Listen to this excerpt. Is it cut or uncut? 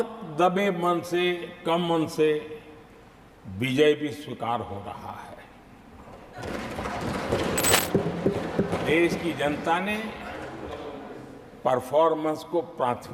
cut